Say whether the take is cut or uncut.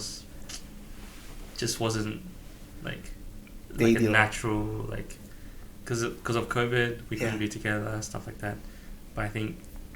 cut